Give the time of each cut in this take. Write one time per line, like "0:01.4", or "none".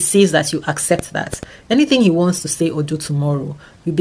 none